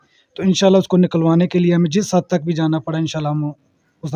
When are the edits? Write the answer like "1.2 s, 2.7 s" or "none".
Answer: none